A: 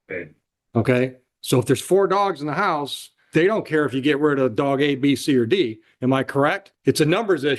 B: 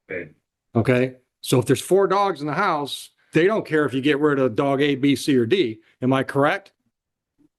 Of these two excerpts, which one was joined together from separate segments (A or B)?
A